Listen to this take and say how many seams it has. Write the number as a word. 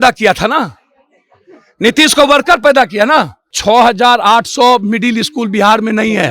one